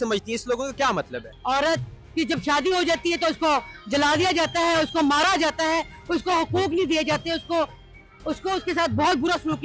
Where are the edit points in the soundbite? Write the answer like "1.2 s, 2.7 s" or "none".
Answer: 1.3 s